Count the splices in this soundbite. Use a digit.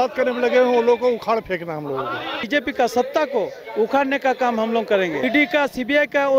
2